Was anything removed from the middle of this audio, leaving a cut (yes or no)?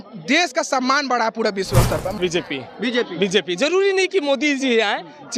yes